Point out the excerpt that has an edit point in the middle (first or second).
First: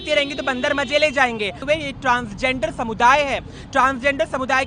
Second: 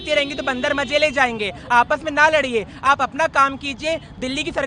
first